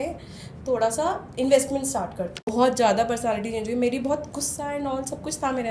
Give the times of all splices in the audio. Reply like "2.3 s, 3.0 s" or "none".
2.5 s